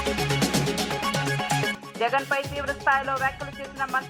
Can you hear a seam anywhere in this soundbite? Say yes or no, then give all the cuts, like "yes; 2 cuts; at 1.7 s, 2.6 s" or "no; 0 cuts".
yes; 1 cut; at 1.8 s